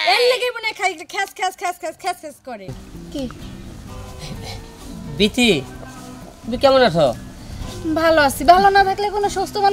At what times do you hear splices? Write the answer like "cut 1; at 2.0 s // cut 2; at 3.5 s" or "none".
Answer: cut 1; at 2.8 s

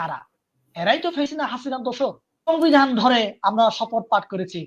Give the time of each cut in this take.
cut 1; at 2.5 s

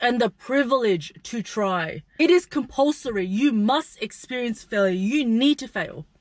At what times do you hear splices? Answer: cut 1; at 2.1 s

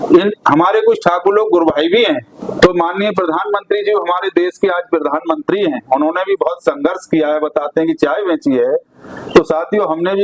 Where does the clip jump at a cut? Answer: cut 1; at 2.4 s

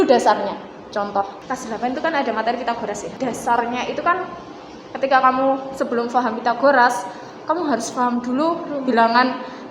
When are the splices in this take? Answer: cut 1; at 1.4 s // cut 2; at 3.1 s

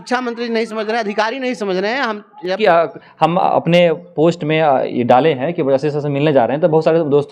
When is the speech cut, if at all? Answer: cut 1; at 2.6 s

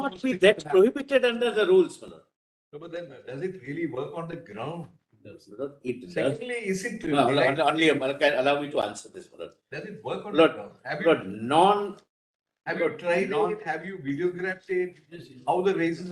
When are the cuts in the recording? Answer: none

